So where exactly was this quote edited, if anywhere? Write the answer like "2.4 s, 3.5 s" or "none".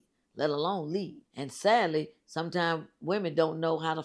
1.2 s